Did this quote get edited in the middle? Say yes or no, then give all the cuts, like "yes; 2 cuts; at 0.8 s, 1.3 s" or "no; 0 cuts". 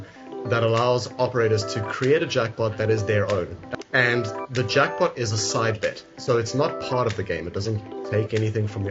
yes; 1 cut; at 3.7 s